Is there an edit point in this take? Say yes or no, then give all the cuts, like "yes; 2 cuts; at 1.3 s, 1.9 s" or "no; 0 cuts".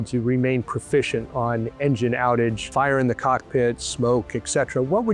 yes; 1 cut; at 2.6 s